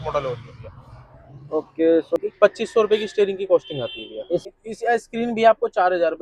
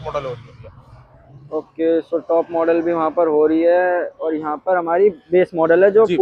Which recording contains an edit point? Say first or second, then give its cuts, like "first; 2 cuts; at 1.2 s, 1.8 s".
first; 2 cuts; at 2.2 s, 4.4 s